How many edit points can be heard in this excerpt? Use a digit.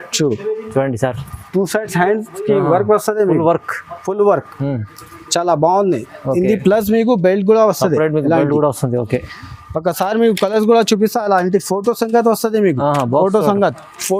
0